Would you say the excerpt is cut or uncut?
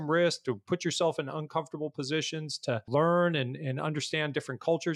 cut